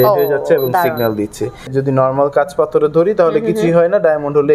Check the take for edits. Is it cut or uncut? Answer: cut